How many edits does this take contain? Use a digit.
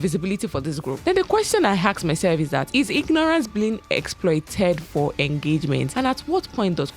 3